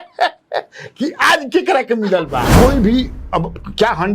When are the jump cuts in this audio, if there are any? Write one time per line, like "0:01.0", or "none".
0:02.5